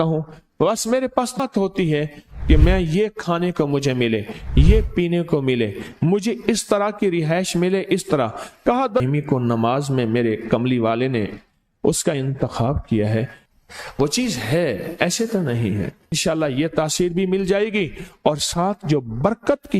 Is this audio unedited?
no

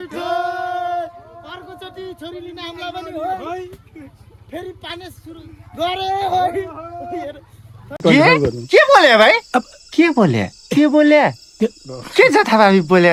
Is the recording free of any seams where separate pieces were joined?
yes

